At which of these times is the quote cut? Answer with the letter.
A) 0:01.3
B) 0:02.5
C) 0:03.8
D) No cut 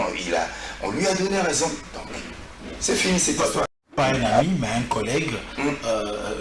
C